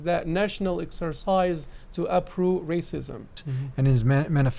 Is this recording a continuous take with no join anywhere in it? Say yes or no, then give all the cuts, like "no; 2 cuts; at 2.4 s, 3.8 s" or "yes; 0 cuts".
no; 1 cut; at 3.3 s